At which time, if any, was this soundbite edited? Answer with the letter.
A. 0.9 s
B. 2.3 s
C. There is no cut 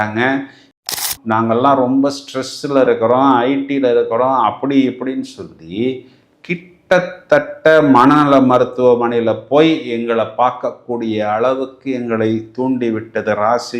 A